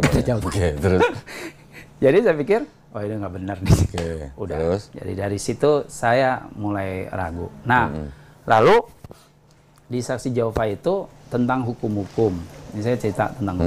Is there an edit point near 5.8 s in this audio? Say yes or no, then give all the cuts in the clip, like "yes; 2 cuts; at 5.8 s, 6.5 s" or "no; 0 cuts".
no; 0 cuts